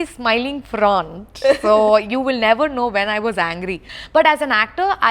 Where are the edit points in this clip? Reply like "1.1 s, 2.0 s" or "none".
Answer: 3.9 s

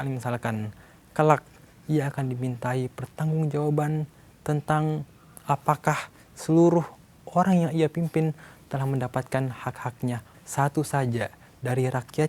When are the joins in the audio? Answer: 10.3 s

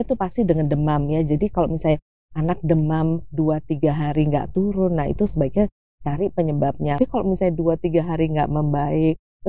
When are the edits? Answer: 7.0 s

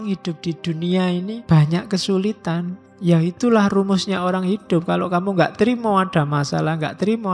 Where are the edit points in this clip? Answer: 1.4 s, 2.8 s

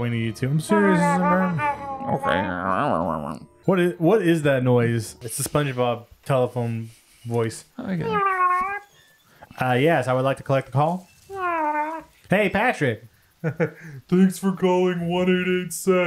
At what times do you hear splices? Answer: 3.4 s, 5.2 s

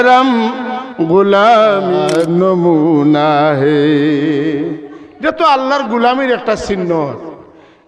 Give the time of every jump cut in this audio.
2.0 s

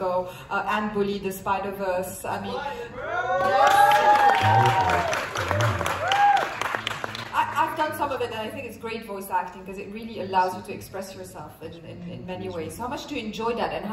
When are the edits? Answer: none

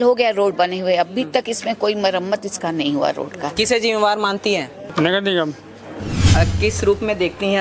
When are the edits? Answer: 4.8 s, 6.1 s

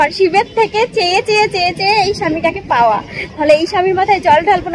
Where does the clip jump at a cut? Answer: none

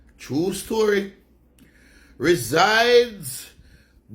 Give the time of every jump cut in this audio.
none

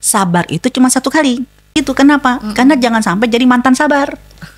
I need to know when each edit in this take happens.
1.8 s

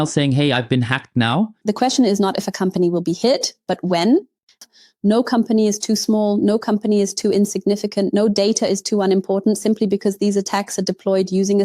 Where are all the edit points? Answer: 1.6 s, 4.6 s

